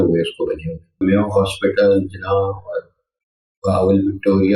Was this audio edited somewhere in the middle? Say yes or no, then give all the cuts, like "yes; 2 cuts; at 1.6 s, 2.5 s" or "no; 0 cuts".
yes; 1 cut; at 1.0 s